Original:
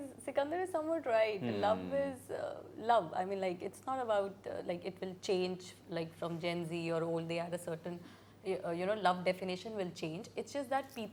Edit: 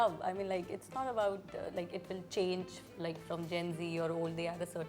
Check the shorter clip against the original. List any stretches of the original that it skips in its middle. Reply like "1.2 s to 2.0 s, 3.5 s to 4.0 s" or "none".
none